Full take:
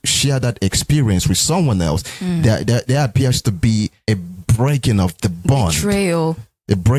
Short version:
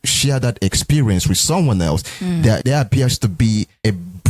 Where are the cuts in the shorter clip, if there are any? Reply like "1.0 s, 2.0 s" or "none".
2.6 s